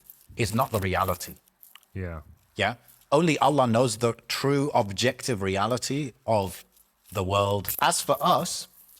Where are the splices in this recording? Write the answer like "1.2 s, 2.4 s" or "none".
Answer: 7.7 s